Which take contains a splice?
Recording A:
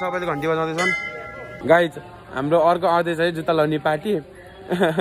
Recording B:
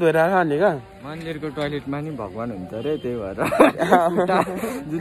A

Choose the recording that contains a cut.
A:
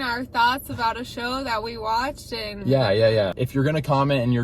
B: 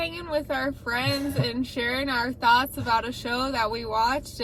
A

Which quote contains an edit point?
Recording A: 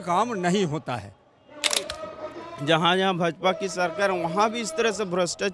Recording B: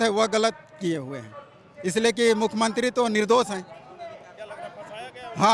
A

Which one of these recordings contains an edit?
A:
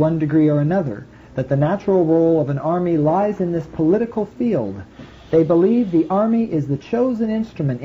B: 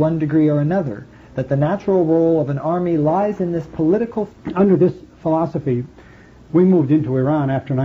A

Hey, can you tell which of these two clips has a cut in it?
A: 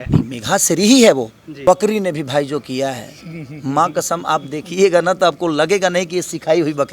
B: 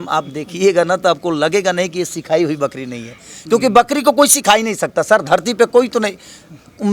A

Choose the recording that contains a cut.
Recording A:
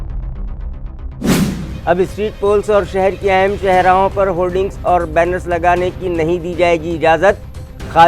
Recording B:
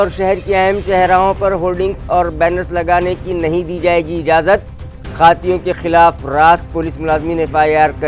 A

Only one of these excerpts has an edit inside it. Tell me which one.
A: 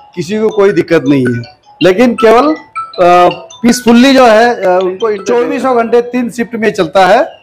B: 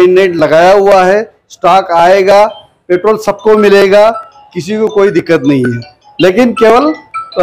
A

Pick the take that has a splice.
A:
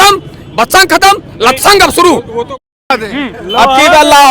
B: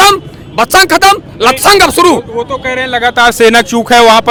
A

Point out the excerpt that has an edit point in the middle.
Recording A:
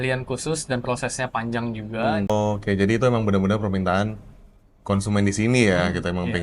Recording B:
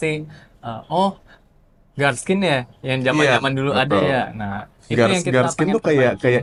A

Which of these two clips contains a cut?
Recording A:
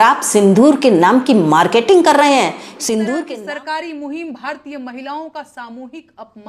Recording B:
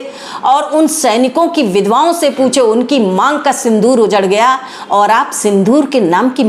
A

